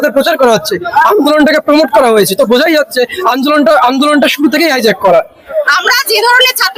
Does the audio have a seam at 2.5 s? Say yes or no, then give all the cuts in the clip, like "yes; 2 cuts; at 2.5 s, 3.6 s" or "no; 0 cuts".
no; 1 cut; at 5.5 s